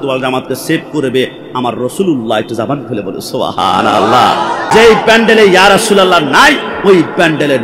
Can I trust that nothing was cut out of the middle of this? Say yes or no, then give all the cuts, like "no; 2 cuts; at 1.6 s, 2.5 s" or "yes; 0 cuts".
no; 1 cut; at 4.7 s